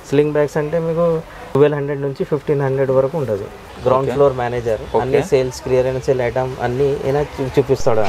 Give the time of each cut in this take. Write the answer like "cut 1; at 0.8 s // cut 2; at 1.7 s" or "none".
cut 1; at 1.6 s // cut 2; at 3.6 s